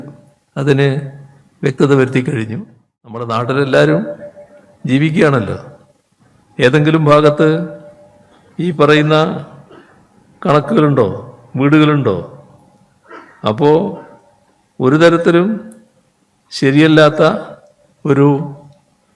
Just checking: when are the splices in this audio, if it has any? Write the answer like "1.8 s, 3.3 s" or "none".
3.3 s